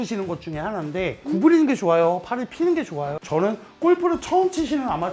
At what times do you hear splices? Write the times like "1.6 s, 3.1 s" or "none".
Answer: 3.2 s